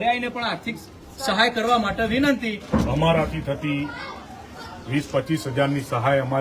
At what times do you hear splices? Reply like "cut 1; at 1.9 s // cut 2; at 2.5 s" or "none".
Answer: cut 1; at 2.6 s